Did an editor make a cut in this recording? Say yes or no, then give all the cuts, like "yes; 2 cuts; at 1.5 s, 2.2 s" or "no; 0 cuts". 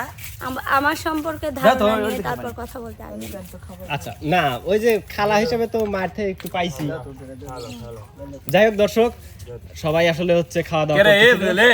no; 0 cuts